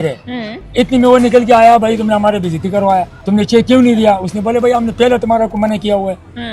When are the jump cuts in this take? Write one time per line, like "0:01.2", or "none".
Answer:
0:03.2